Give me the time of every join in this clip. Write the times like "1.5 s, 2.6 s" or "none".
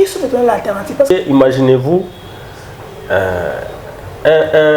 1.1 s